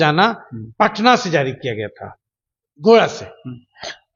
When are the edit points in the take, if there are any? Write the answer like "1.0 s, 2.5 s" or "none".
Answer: none